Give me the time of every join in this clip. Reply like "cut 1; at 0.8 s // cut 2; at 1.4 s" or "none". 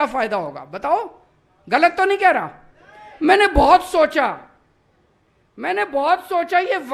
none